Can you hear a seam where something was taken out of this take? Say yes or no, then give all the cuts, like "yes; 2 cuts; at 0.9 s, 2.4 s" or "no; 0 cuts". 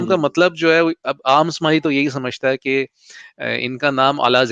no; 0 cuts